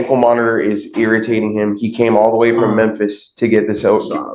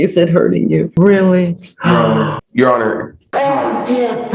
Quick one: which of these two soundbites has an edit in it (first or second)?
second